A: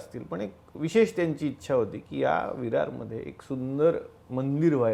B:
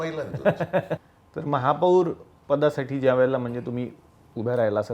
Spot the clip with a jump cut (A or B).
B